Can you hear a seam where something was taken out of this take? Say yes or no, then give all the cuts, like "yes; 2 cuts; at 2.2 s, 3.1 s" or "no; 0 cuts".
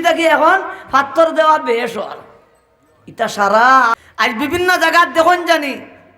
yes; 1 cut; at 4.0 s